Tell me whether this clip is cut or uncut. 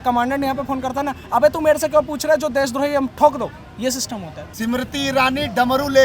cut